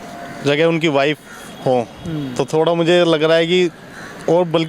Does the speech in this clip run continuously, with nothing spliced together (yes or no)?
yes